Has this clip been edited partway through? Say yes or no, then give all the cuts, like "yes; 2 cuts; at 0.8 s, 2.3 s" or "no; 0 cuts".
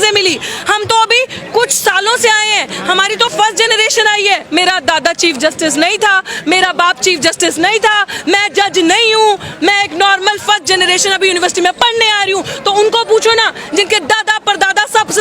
yes; 1 cut; at 4.4 s